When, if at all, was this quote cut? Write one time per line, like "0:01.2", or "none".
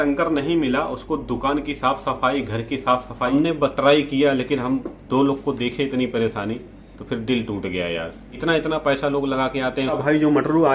0:03.3
0:10.0